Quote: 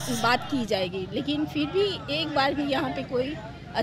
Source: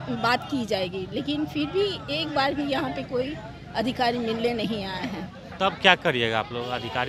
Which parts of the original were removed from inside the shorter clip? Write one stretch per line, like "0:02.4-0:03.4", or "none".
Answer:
none